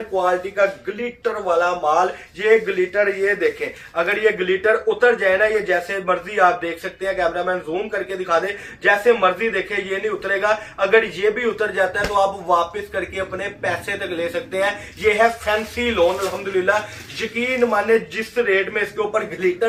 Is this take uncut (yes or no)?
yes